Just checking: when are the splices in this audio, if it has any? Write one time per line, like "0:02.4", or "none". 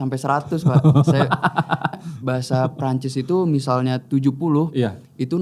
0:02.0

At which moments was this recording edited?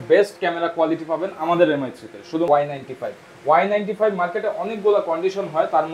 0:02.5

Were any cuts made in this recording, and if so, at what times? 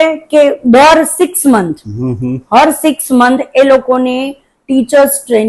none

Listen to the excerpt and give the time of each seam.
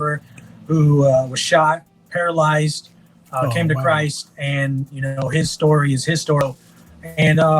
0:06.4

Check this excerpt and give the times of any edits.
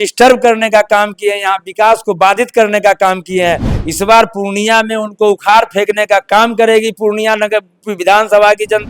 0:03.7

